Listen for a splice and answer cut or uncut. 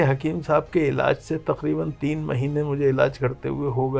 uncut